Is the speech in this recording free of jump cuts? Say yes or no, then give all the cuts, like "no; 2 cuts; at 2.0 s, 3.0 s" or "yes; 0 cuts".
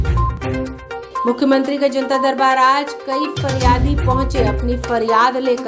yes; 0 cuts